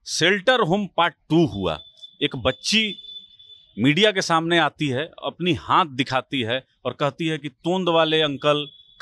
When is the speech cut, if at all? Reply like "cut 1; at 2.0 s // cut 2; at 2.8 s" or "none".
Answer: none